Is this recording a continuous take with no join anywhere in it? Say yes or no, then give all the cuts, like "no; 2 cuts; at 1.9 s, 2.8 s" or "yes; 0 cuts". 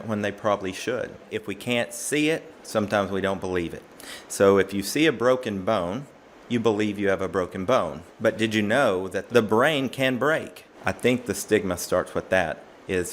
no; 4 cuts; at 1.3 s, 8.0 s, 9.2 s, 10.7 s